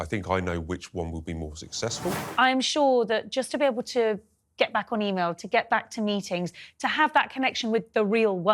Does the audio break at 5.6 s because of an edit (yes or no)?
no